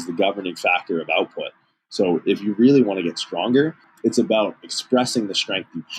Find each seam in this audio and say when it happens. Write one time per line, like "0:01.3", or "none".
0:03.8

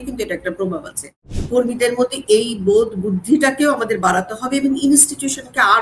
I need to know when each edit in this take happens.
0:01.3

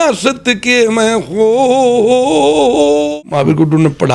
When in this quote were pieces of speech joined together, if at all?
0:03.2

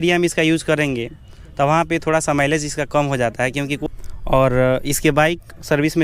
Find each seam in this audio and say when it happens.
0:03.8

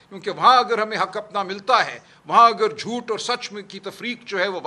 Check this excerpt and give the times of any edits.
none

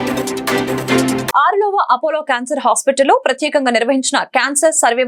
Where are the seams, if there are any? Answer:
0:01.3

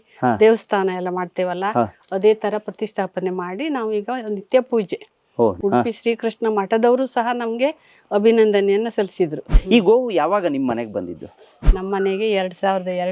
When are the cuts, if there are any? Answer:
0:05.6
0:09.5

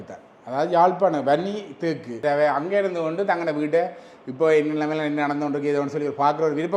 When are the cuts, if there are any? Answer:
0:02.2

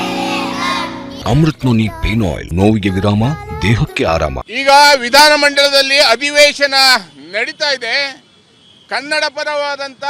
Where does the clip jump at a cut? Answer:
0:01.1
0:02.4
0:04.5

